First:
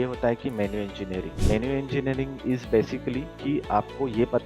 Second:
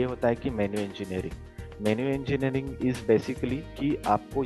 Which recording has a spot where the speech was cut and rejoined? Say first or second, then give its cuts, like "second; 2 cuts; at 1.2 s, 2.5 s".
first; 1 cut; at 1.3 s